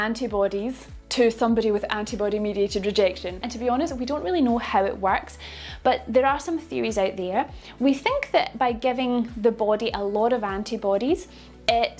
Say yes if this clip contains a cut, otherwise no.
no